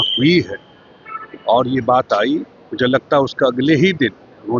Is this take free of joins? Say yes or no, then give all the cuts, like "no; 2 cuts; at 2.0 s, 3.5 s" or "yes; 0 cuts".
yes; 0 cuts